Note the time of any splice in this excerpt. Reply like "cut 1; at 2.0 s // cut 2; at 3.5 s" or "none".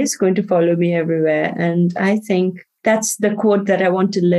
cut 1; at 2.7 s